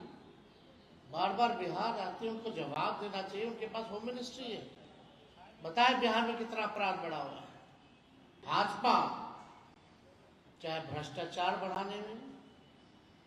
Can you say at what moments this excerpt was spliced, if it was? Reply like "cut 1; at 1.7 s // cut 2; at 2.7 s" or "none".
cut 1; at 8.4 s

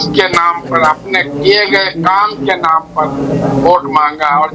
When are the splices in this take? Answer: none

